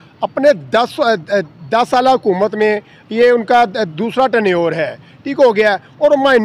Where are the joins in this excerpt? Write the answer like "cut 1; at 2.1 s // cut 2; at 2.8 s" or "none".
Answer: none